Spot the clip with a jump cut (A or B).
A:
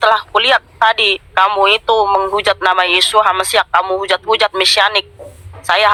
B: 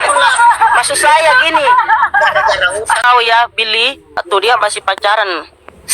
B